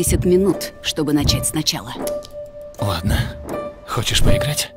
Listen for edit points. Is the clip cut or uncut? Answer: uncut